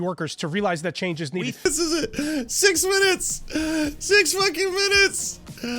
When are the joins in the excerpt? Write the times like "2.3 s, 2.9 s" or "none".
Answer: 1.7 s

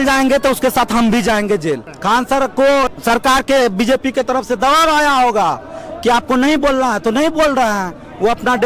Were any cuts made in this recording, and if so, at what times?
1.9 s, 2.9 s

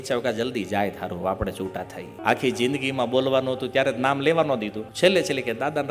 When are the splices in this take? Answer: 2.1 s, 4.8 s

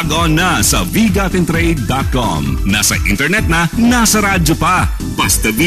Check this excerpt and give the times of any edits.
none

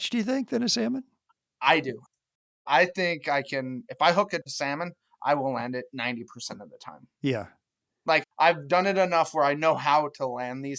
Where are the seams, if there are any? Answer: 2.4 s

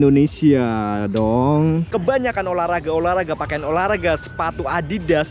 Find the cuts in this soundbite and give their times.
1.9 s

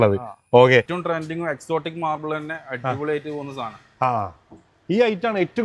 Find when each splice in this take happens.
0.9 s

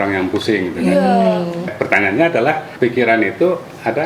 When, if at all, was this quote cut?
1.7 s, 2.7 s

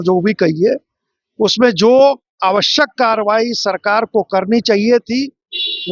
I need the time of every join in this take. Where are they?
none

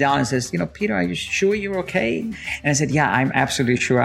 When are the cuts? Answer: 2.3 s

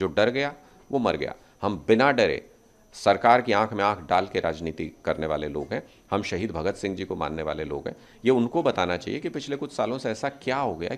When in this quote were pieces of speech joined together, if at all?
none

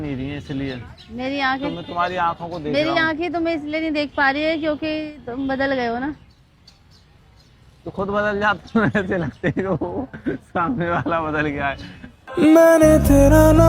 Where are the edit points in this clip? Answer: none

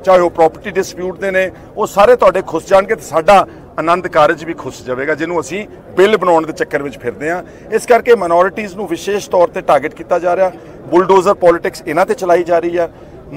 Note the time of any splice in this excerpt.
none

